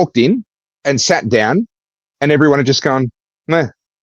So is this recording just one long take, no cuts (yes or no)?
yes